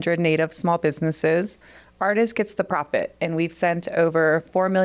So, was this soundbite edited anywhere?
no; 0 cuts

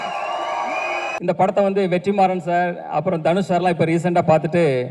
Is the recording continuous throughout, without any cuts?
no; 1 cut; at 1.1 s

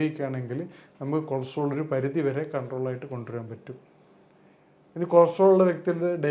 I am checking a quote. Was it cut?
no; 0 cuts

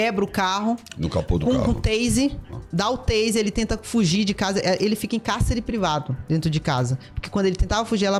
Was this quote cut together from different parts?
no; 0 cuts

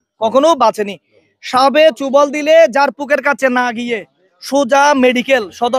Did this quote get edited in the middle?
no; 0 cuts

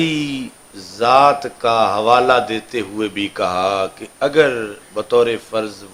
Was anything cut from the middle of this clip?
no; 0 cuts

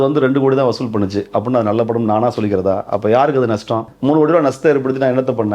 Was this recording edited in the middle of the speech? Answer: yes; 1 cut; at 3.9 s

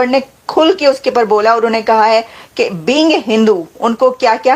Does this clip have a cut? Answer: no; 0 cuts

